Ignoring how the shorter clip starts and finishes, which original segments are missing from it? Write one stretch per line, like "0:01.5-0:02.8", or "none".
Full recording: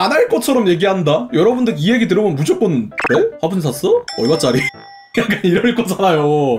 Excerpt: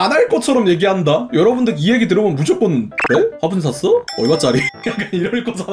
0:04.8-0:05.1